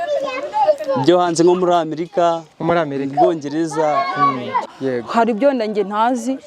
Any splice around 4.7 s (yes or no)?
yes